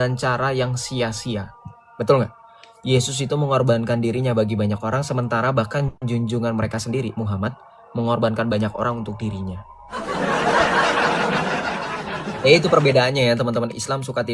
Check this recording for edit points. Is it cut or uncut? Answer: uncut